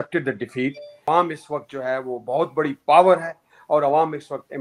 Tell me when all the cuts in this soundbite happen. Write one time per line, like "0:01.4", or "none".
0:00.9